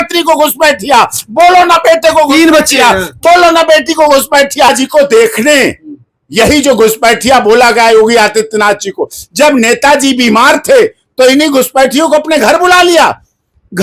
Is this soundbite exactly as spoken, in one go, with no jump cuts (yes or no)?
no